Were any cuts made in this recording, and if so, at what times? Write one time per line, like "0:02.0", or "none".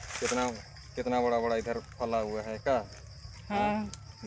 none